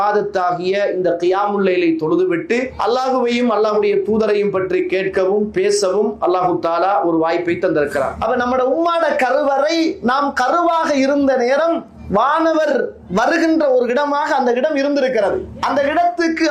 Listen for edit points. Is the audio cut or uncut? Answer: cut